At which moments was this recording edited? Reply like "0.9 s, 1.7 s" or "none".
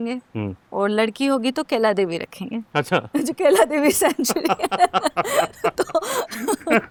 none